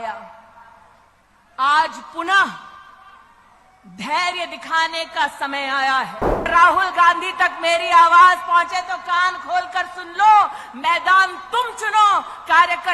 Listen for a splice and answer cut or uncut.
cut